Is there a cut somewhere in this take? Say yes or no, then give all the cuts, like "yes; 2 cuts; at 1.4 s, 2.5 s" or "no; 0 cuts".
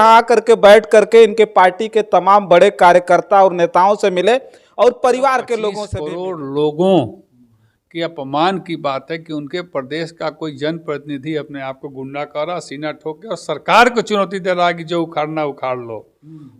yes; 1 cut; at 5.9 s